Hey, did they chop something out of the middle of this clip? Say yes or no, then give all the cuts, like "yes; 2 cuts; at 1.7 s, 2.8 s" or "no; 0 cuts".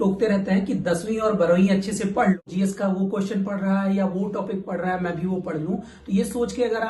yes; 1 cut; at 2.4 s